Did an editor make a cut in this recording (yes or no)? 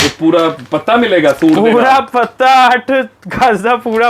no